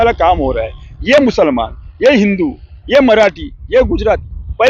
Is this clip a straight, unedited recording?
yes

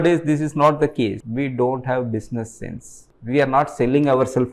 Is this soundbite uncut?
no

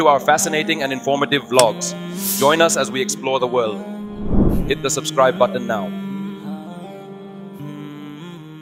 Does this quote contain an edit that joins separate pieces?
no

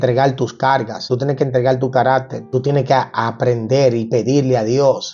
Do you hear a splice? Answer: yes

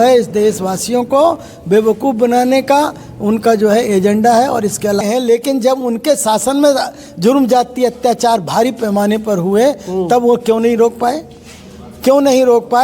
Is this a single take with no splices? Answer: no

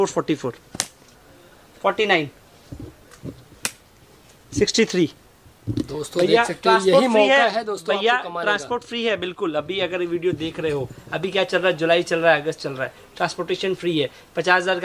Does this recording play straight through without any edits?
yes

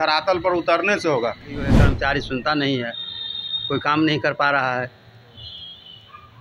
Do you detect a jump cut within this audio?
yes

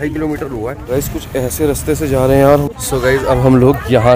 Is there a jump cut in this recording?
yes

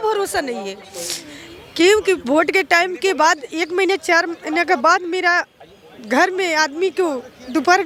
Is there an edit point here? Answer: no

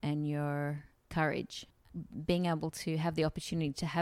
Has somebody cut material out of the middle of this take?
yes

